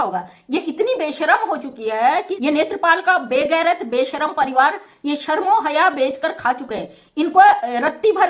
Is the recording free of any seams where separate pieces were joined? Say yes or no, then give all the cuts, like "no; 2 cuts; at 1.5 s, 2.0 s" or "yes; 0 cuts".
no; 1 cut; at 2.3 s